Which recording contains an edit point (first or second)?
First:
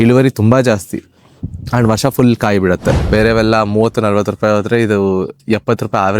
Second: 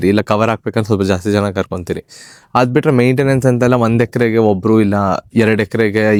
first